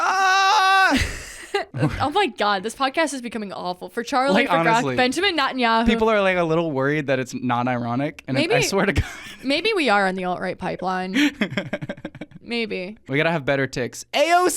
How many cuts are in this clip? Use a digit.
2